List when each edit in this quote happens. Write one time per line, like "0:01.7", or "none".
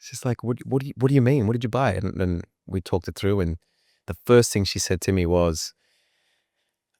none